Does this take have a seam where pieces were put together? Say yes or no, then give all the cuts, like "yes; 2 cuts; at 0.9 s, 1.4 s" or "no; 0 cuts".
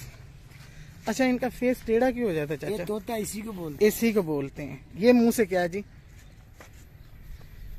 no; 0 cuts